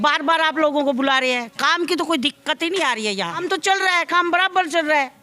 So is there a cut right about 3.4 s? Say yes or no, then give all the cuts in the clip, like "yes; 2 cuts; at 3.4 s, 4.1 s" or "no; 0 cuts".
yes; 1 cut; at 3.4 s